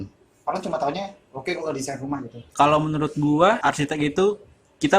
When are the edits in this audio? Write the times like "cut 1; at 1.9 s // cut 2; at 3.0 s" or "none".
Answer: cut 1; at 2.4 s // cut 2; at 3.6 s